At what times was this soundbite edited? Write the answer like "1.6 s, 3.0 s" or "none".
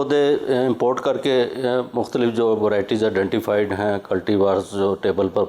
none